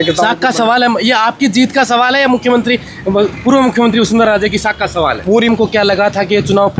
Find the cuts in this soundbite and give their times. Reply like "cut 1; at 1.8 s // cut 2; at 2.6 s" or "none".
cut 1; at 5.5 s